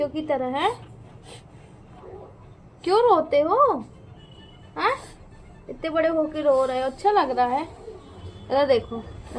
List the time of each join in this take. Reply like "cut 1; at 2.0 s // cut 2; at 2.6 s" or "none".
none